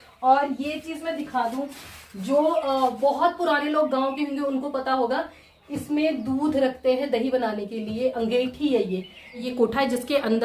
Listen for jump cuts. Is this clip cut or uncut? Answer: cut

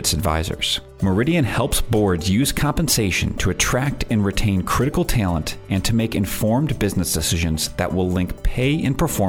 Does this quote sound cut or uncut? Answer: uncut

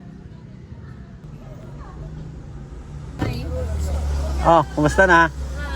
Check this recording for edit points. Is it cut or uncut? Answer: cut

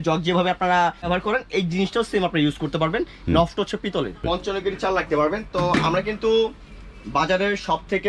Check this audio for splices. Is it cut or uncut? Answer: cut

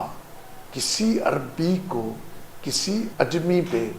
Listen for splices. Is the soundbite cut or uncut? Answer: cut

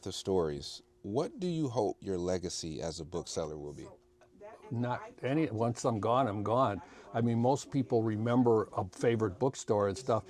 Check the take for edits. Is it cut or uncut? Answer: uncut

